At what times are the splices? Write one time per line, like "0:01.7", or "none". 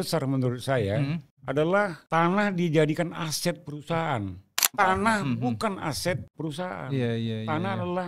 0:01.3
0:02.0
0:04.7
0:06.3